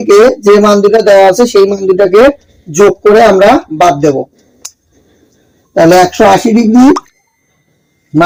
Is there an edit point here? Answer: no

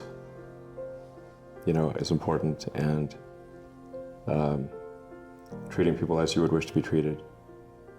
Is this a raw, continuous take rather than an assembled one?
yes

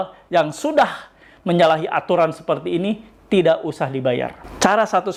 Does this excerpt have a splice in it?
no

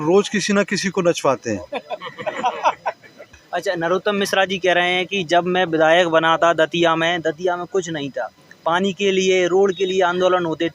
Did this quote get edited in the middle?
yes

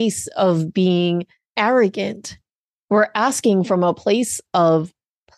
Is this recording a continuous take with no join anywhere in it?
no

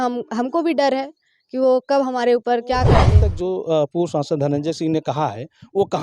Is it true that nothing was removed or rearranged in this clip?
no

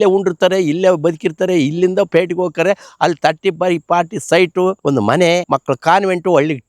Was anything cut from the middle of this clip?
yes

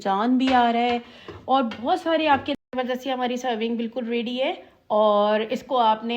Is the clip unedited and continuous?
no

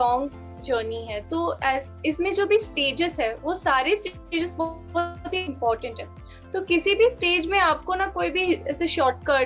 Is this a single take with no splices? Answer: yes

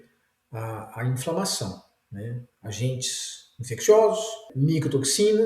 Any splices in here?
yes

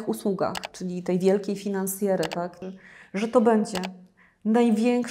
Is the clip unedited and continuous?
no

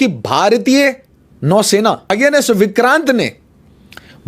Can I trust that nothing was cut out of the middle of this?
no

